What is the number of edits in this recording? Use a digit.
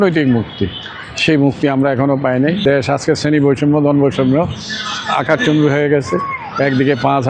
1